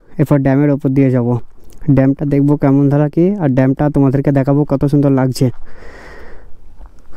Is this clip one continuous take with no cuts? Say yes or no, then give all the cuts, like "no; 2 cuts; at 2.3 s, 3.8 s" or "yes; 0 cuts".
yes; 0 cuts